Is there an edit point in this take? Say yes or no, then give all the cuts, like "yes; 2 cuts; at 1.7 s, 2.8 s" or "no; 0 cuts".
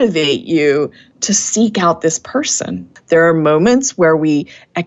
yes; 1 cut; at 2.9 s